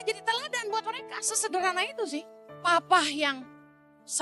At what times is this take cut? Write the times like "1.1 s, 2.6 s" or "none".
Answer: 2.4 s